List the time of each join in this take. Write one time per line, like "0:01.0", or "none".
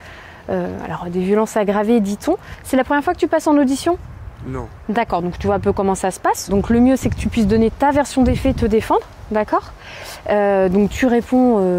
0:02.5